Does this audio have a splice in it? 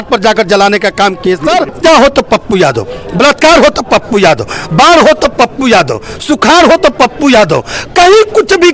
yes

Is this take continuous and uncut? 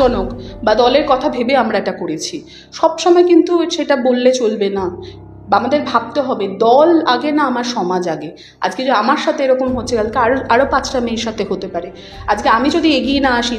yes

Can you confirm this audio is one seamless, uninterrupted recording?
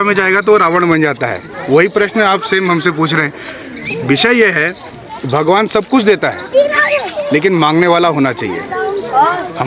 yes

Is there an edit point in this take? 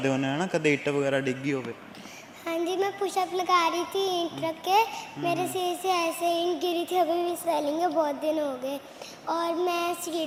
no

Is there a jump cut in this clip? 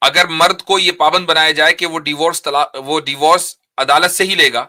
no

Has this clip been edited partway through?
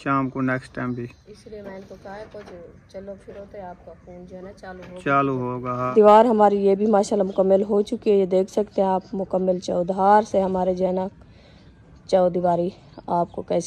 yes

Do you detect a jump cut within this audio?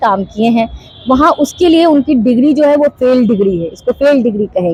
no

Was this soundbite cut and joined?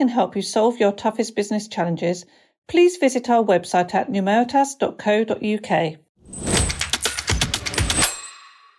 yes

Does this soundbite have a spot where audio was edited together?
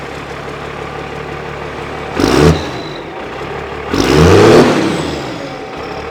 no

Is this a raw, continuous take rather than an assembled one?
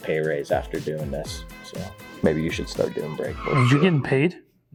yes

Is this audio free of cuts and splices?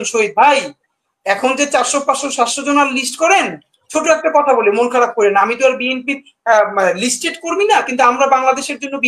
yes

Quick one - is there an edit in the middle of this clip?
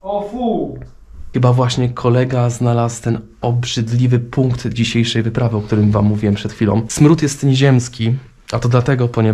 yes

